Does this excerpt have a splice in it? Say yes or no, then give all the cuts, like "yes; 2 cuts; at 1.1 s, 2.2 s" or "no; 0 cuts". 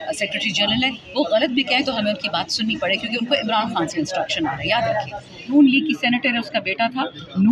yes; 1 cut; at 5.5 s